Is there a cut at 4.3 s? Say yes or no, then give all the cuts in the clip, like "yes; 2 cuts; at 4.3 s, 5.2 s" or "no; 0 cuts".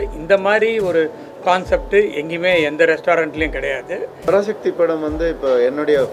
yes; 1 cut; at 4.3 s